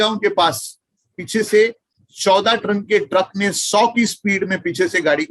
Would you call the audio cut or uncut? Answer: cut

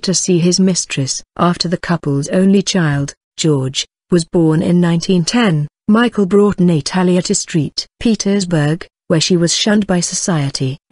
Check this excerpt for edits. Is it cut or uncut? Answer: cut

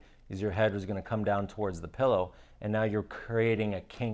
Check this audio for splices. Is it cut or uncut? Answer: uncut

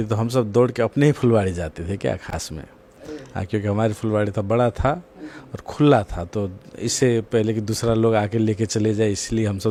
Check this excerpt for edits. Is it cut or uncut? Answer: uncut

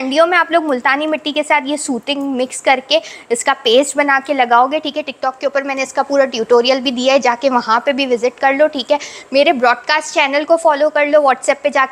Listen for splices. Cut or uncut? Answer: uncut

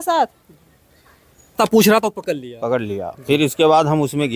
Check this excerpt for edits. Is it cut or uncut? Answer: cut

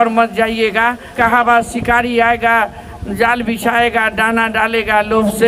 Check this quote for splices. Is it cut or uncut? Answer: cut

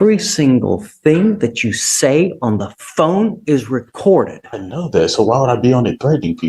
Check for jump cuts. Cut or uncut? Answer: uncut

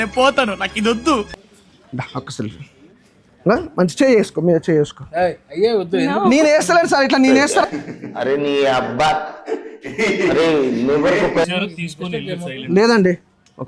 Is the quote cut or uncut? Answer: uncut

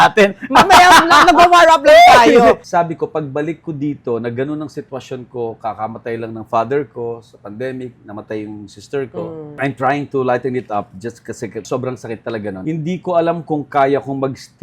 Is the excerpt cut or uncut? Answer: cut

